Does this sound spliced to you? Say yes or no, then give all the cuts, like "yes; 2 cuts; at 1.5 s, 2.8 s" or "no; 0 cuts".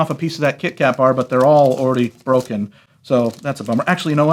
no; 0 cuts